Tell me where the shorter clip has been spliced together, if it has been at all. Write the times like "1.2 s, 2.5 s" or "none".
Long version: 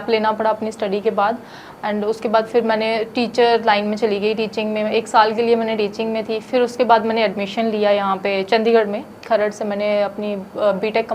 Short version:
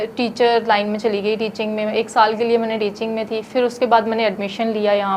none